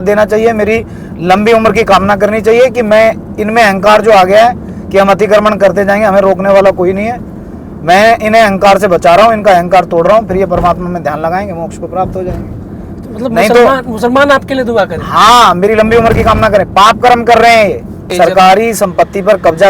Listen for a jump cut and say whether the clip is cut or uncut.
cut